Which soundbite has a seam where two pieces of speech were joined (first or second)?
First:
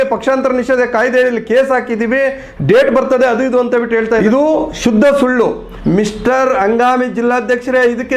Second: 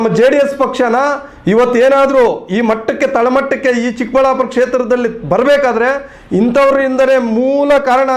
first